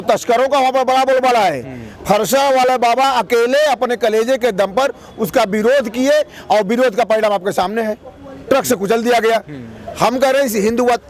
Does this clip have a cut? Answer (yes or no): no